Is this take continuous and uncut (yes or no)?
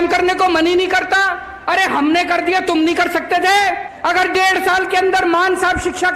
no